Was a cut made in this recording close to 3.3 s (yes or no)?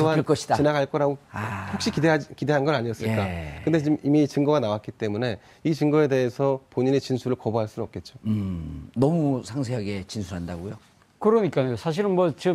yes